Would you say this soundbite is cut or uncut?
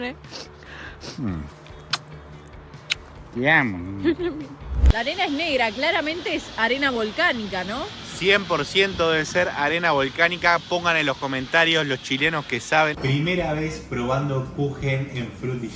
cut